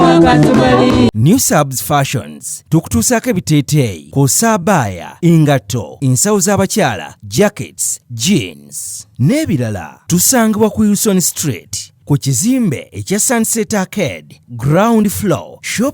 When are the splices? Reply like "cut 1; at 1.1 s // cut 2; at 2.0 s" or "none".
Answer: cut 1; at 1.1 s